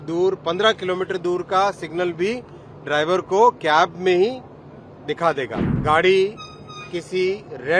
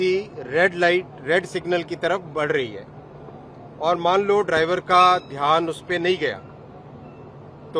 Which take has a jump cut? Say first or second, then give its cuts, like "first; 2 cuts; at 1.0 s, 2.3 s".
first; 1 cut; at 5.5 s